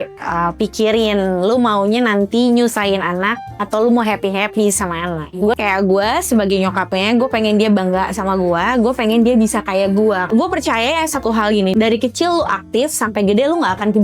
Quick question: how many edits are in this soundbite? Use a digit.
3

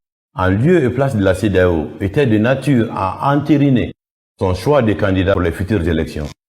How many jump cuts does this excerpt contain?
1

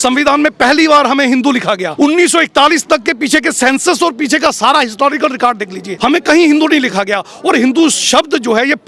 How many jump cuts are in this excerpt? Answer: 2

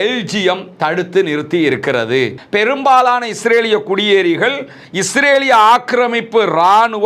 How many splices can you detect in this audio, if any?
1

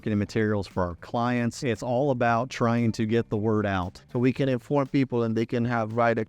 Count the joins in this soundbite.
2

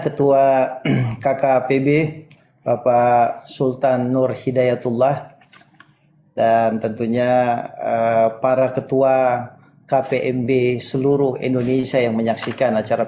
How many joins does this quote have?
0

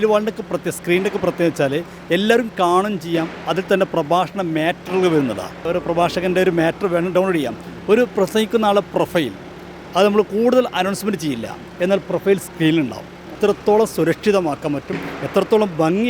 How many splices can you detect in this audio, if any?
2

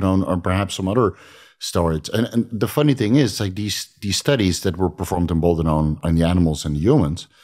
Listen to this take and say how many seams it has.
1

